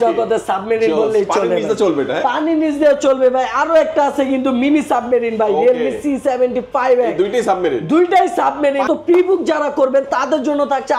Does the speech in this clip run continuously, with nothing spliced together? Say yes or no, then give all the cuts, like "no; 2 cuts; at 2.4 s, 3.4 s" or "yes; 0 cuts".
no; 1 cut; at 8.9 s